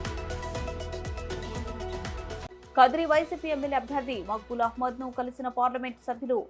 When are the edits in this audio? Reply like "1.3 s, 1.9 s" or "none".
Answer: 2.4 s

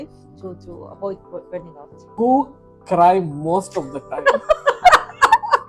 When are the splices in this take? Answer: 2.0 s

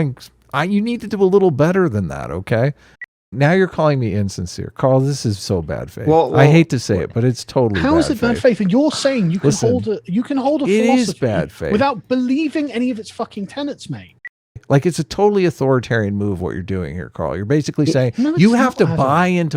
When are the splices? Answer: 3.1 s, 14.5 s

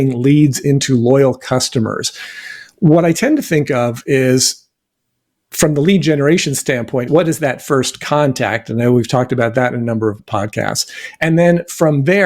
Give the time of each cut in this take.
none

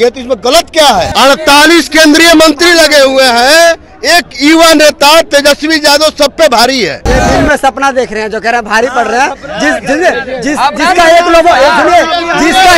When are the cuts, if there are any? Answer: 1.1 s, 7.0 s

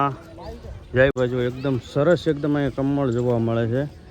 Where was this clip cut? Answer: 1.2 s

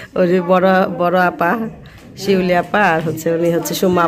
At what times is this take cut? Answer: none

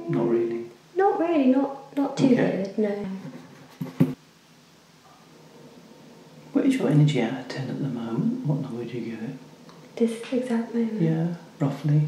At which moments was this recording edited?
4.3 s

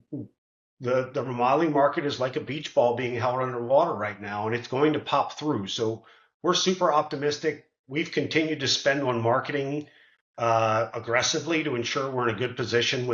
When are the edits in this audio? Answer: none

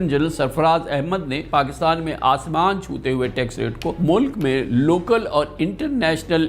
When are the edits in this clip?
1.4 s, 4.0 s

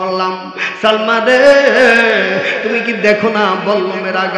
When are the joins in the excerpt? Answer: none

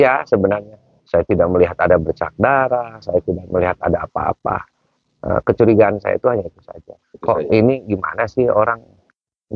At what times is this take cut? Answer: none

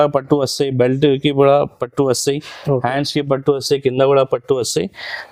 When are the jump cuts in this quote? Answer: none

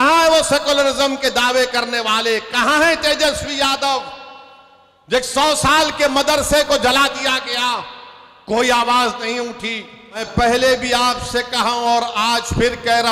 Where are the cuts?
10.2 s

